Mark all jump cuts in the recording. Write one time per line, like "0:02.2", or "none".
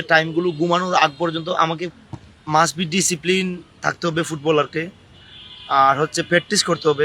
0:01.9